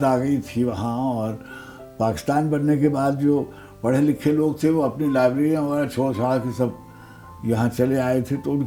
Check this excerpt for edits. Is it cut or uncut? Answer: uncut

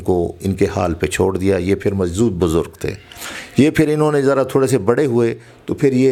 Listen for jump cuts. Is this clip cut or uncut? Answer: uncut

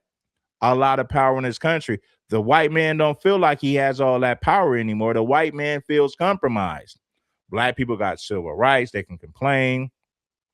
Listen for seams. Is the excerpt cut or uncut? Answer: cut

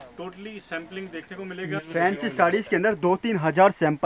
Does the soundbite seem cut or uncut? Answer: cut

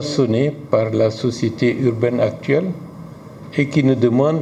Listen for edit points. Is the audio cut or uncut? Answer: uncut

